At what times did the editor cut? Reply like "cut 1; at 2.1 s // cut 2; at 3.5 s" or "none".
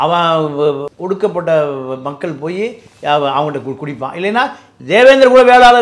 cut 1; at 0.9 s // cut 2; at 4.7 s